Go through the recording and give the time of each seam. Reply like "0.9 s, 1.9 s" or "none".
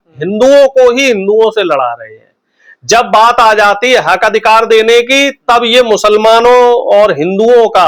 none